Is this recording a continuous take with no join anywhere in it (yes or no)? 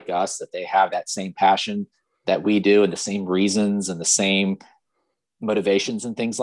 yes